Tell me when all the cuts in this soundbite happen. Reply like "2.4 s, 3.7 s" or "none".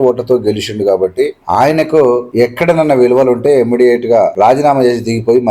1.4 s, 2.3 s, 4.3 s